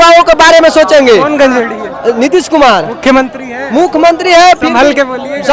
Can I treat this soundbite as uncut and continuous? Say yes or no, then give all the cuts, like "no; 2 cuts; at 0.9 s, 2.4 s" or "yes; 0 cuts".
no; 1 cut; at 1.3 s